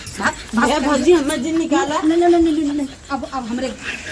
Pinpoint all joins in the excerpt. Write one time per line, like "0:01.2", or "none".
none

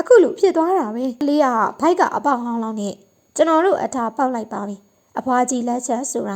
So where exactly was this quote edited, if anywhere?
0:01.2

